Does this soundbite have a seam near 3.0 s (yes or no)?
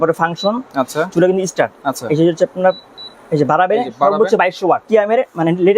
no